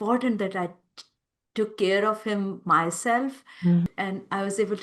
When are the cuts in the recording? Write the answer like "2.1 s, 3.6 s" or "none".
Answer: 3.9 s